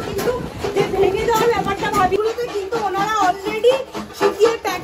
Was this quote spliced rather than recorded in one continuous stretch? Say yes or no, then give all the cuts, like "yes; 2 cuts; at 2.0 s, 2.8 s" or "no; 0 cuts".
yes; 1 cut; at 2.2 s